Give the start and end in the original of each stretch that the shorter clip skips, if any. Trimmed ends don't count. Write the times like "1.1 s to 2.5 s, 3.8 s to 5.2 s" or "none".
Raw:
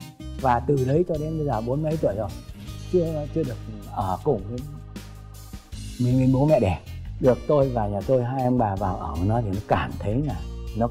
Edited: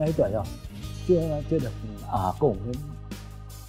none